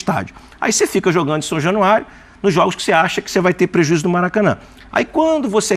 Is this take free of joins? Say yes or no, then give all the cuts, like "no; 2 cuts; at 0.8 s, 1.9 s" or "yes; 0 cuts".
yes; 0 cuts